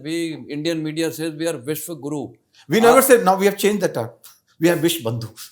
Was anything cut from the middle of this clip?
no; 0 cuts

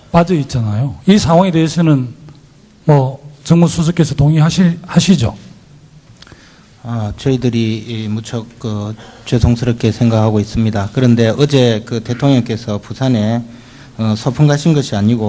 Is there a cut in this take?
no; 0 cuts

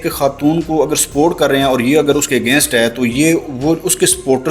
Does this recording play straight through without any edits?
yes; 0 cuts

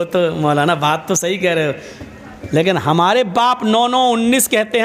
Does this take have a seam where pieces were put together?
no; 0 cuts

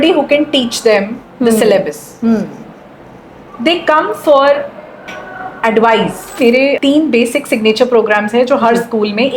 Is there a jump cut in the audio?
yes; 1 cut; at 6.6 s

